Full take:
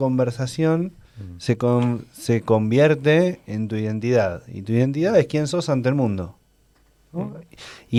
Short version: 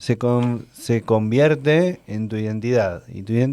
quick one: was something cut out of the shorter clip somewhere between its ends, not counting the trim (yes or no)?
no